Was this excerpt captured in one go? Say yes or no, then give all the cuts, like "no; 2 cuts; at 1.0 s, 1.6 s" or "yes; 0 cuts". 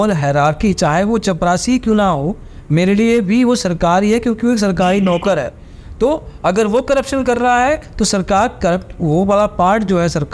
yes; 0 cuts